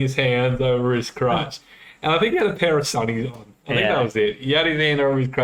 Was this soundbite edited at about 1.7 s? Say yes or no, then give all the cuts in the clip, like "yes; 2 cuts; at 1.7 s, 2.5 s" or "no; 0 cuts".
no; 0 cuts